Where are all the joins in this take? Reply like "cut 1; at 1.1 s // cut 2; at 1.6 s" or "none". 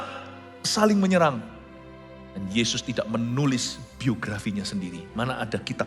none